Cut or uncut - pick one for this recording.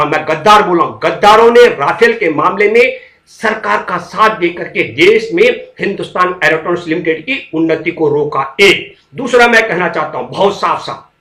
uncut